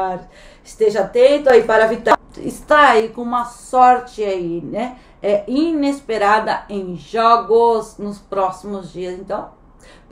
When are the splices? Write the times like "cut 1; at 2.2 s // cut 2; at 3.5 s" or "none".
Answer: cut 1; at 2.1 s